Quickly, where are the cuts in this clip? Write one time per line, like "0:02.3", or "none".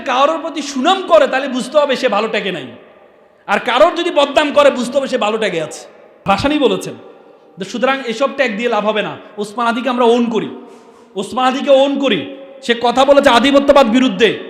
0:06.3